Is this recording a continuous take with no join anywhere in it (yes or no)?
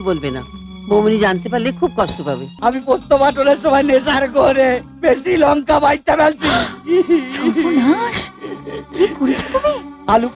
no